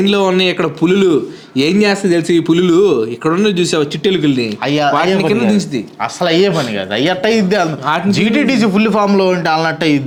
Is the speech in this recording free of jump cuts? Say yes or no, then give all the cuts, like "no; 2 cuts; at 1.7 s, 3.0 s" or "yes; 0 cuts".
yes; 0 cuts